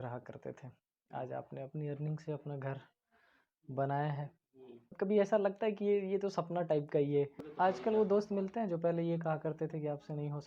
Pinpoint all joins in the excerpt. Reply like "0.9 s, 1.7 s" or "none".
4.9 s, 7.5 s